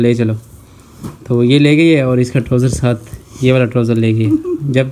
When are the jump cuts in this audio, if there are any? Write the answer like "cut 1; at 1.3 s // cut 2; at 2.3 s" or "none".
none